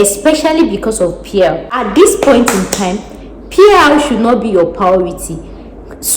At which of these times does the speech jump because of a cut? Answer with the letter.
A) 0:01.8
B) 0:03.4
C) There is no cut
A